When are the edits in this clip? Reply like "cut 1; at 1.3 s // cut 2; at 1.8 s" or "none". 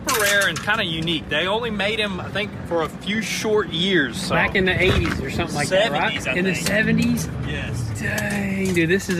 none